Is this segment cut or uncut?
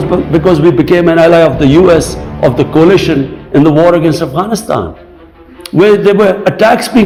uncut